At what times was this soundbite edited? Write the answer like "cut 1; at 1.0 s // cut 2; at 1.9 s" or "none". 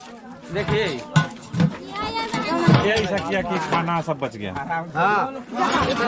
none